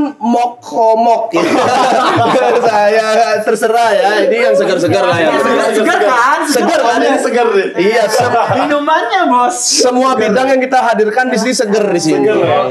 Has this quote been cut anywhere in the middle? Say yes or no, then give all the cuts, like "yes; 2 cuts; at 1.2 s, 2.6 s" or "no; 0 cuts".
no; 0 cuts